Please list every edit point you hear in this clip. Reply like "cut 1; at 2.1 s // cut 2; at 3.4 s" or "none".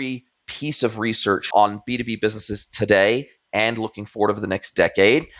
cut 1; at 1.5 s